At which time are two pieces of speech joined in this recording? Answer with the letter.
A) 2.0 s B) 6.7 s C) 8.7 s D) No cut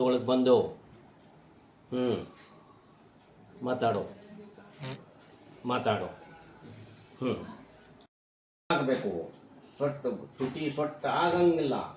C